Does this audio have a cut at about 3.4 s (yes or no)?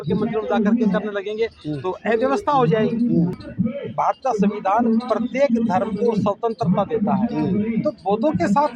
yes